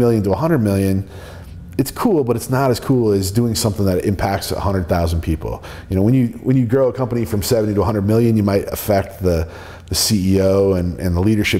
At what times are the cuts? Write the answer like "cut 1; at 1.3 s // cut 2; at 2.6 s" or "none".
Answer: none